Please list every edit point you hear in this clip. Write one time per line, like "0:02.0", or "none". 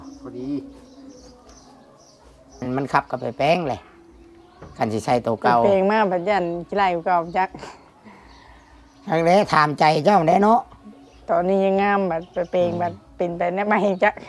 0:02.7

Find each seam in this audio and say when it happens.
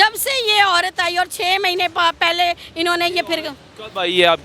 none

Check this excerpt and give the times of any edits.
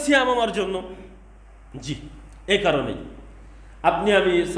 none

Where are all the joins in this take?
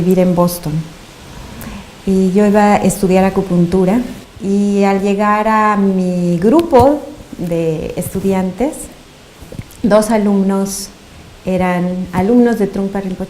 0:11.4

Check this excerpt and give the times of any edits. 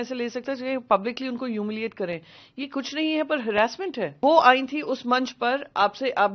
0:04.1

